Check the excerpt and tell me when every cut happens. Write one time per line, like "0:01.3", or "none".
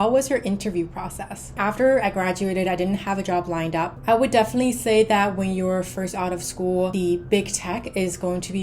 0:01.5
0:03.9
0:06.9